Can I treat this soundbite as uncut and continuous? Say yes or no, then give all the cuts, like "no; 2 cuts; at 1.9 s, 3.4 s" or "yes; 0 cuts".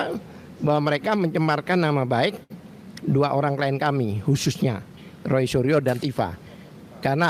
yes; 0 cuts